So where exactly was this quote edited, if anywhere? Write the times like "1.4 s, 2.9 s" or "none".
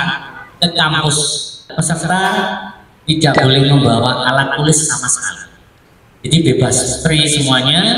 1.7 s